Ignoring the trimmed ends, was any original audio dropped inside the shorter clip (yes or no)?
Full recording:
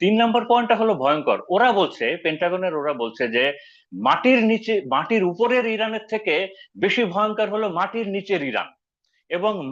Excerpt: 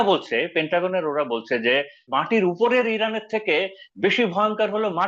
yes